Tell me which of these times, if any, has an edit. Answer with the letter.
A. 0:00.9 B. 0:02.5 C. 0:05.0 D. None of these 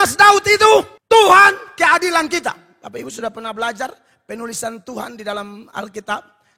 A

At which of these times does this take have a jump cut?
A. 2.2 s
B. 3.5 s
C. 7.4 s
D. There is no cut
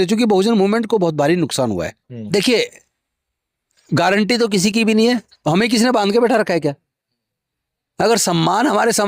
A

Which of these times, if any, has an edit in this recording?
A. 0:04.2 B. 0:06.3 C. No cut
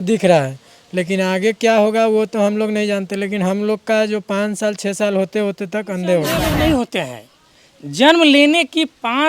B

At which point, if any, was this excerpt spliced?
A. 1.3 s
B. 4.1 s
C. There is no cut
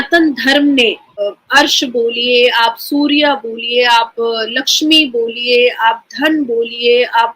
A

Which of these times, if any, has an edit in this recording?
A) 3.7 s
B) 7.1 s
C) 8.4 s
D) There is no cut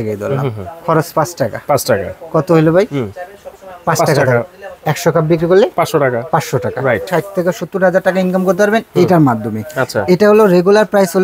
B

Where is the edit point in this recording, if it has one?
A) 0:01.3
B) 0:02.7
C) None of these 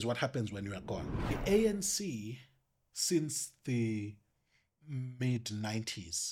A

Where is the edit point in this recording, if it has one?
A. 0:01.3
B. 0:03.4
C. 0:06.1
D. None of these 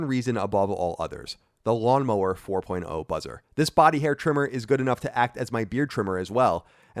B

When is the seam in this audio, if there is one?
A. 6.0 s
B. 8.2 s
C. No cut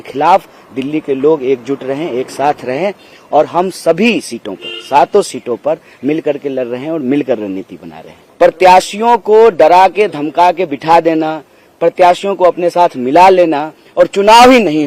B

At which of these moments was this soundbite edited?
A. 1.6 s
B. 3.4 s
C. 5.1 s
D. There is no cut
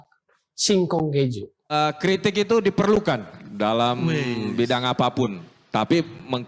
A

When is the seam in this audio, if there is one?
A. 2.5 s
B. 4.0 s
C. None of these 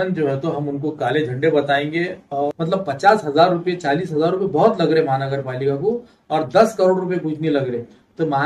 A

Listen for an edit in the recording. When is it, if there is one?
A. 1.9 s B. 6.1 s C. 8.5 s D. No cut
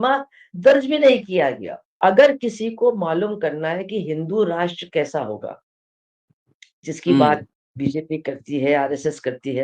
A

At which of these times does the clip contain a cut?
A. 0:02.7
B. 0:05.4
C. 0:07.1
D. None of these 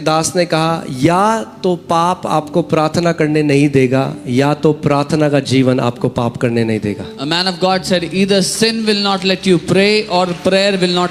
D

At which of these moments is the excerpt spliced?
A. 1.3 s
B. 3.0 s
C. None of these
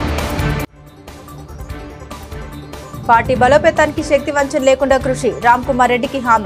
B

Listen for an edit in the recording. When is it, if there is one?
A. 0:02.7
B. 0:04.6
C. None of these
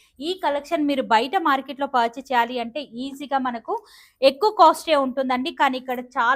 C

